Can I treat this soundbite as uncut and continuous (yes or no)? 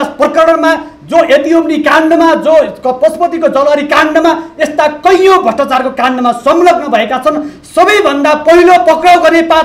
yes